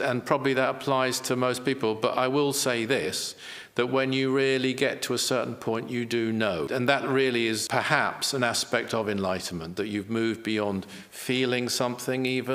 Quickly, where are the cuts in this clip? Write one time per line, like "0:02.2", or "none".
0:06.7
0:07.6